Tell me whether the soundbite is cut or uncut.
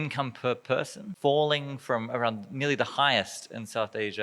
cut